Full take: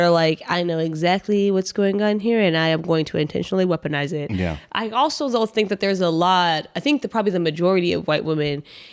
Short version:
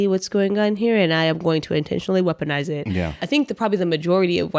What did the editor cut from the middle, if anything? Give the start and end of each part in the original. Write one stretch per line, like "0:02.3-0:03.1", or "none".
0:04.6-0:06.7